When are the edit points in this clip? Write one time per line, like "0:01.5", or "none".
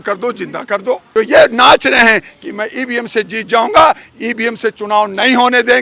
0:01.0